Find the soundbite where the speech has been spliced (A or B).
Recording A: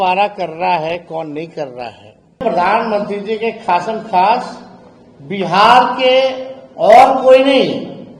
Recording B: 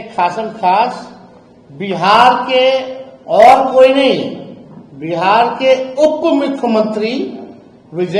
A